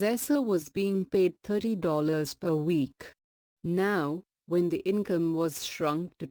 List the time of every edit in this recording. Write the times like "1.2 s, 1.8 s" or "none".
none